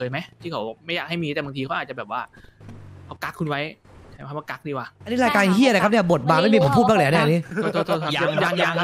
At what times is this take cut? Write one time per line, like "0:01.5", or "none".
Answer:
none